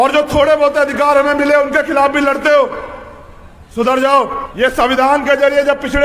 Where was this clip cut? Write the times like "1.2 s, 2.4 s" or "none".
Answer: 4.4 s